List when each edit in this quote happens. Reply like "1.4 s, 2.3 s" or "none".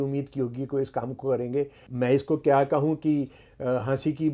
1.8 s